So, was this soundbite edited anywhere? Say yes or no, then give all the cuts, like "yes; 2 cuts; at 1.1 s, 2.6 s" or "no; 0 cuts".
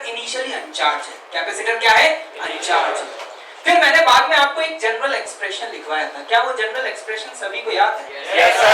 no; 0 cuts